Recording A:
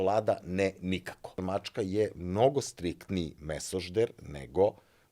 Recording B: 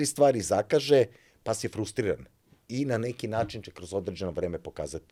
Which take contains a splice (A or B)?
A